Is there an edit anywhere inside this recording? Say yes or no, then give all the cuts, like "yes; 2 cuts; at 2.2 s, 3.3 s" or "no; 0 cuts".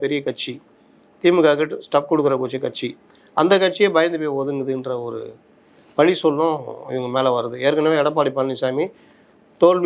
no; 0 cuts